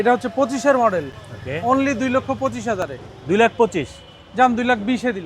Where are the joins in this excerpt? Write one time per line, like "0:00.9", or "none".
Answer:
none